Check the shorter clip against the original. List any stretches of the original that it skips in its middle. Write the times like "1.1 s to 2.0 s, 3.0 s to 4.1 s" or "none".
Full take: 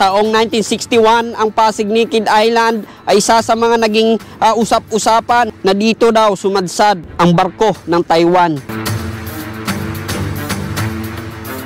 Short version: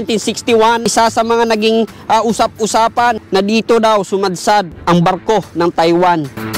1.3 s to 3.2 s